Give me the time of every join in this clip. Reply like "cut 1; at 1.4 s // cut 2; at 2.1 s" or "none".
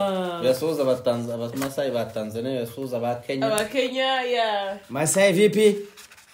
none